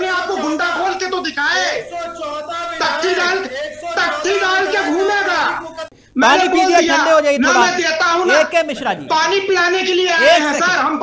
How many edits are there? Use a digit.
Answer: 1